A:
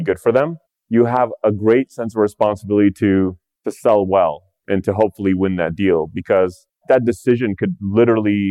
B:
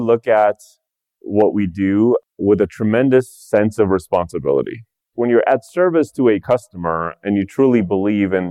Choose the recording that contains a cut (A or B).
B